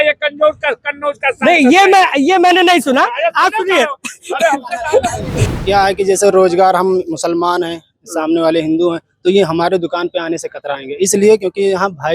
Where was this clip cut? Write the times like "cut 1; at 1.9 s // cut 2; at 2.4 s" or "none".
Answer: cut 1; at 5.4 s